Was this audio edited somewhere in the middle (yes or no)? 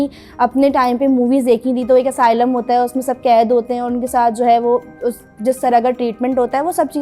no